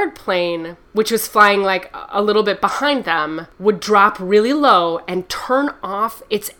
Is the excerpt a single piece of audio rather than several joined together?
yes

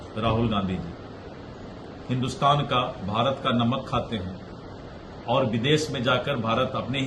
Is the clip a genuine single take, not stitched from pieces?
yes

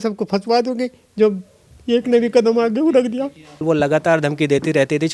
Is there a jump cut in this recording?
yes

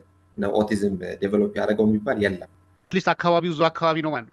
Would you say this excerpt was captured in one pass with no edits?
no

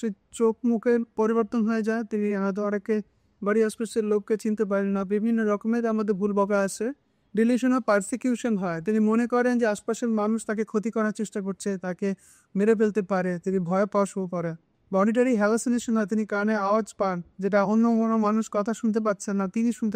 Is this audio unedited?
yes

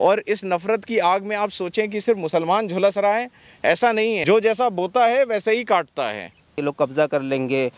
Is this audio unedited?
no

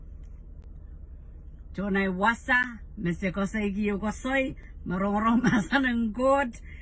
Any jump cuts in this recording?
no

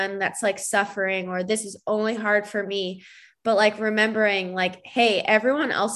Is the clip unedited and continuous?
yes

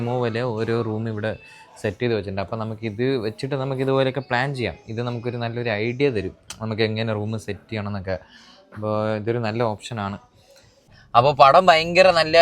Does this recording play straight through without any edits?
no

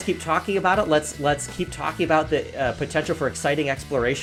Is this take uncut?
yes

